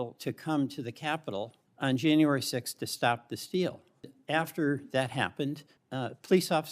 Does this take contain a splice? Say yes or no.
yes